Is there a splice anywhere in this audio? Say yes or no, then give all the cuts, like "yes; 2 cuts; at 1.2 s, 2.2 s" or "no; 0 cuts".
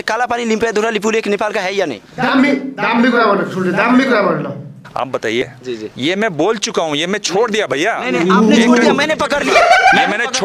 yes; 1 cut; at 5.4 s